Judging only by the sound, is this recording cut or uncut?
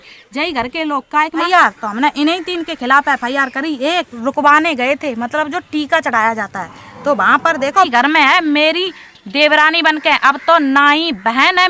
cut